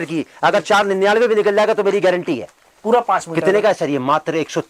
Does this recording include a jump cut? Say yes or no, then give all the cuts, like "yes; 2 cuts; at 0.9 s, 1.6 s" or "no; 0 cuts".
no; 0 cuts